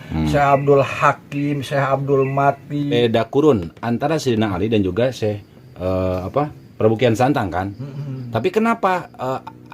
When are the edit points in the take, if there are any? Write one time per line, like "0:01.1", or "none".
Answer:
0:02.8